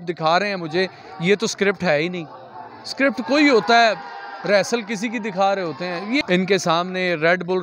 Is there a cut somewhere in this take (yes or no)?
yes